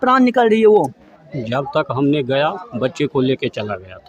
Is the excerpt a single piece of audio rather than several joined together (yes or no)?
yes